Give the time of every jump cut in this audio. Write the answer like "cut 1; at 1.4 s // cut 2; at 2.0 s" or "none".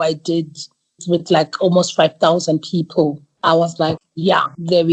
cut 1; at 3.3 s // cut 2; at 3.9 s